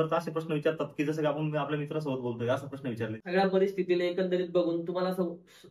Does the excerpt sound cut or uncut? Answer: cut